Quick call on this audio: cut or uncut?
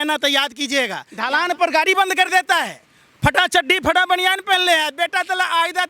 cut